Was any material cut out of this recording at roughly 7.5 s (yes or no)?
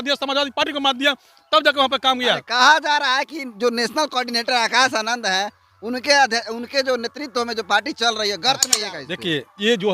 no